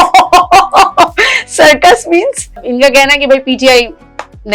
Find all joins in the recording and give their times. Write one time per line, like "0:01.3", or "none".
0:02.7